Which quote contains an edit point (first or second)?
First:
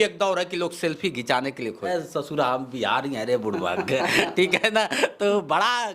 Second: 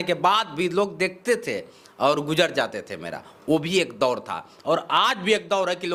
first